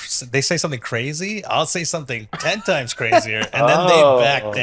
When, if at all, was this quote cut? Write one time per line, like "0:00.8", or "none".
none